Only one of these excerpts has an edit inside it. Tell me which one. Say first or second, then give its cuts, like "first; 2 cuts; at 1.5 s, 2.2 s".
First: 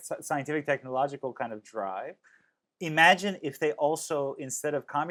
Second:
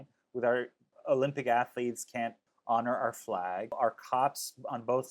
second; 3 cuts; at 0.9 s, 2.5 s, 3.8 s